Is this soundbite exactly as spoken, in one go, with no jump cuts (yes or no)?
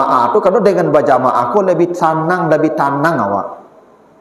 yes